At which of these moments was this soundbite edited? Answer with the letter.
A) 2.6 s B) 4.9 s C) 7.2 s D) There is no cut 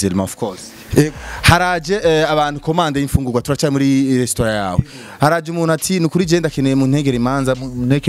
D